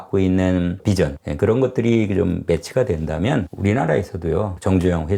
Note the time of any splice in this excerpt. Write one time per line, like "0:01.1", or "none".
none

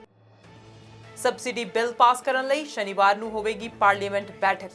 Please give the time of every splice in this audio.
0:00.9

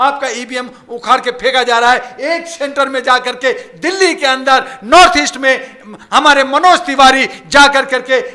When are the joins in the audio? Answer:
none

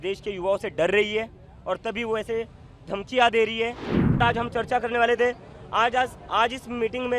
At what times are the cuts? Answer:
0:04.2

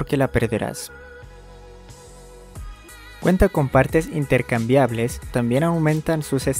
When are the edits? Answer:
0:00.8
0:03.2
0:05.3

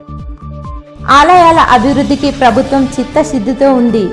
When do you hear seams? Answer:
0:00.9

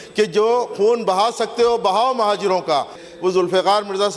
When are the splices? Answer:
0:03.1

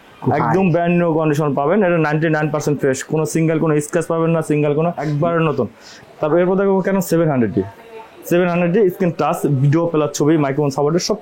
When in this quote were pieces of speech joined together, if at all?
0:05.0
0:05.9

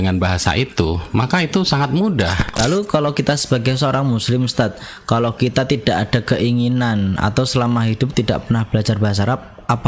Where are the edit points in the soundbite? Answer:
0:02.6

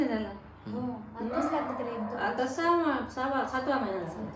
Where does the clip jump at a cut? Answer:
none

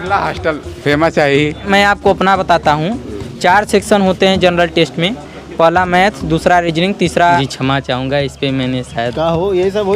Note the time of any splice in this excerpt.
0:01.7
0:07.5

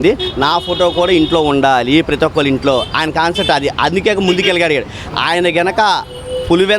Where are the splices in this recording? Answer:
none

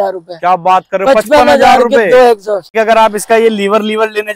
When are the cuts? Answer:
0:02.7

